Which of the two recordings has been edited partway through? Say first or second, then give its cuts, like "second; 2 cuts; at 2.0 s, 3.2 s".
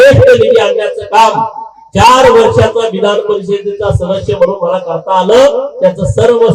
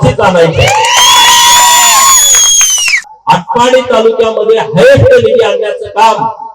second; 1 cut; at 3.0 s